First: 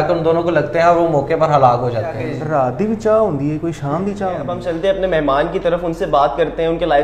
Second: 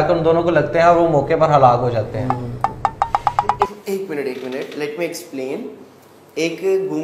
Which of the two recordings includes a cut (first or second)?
first